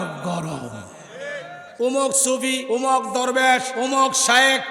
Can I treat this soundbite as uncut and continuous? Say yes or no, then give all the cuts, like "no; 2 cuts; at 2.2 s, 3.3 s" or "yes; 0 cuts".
no; 3 cuts; at 1.6 s, 2.6 s, 3.7 s